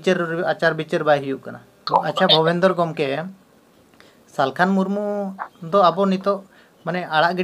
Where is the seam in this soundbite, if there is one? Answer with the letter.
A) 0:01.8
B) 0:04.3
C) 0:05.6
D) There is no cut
A